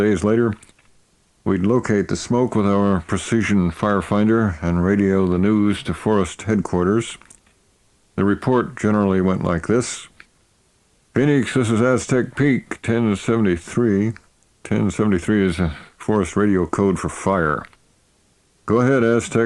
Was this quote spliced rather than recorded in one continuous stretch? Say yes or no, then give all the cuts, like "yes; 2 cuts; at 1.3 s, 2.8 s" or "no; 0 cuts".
no; 0 cuts